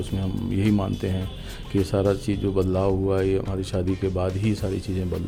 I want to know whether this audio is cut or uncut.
uncut